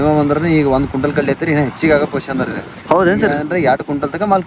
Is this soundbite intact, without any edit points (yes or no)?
yes